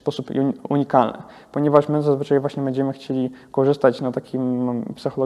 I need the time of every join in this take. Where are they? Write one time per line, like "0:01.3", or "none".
none